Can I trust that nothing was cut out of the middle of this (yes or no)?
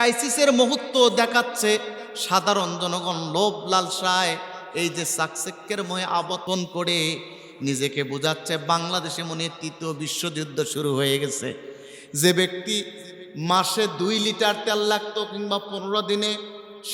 no